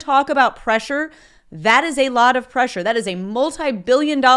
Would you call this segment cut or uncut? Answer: uncut